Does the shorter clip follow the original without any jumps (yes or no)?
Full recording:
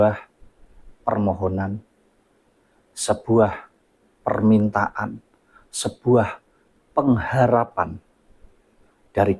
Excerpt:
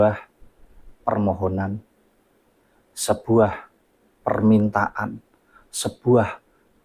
yes